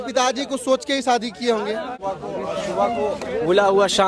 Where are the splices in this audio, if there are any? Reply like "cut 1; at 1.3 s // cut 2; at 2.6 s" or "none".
cut 1; at 2.0 s